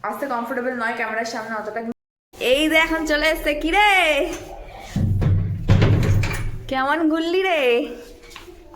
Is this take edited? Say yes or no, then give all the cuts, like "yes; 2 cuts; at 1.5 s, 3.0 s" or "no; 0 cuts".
yes; 1 cut; at 1.9 s